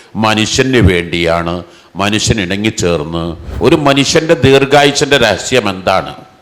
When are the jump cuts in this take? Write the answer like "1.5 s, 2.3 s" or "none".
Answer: 3.4 s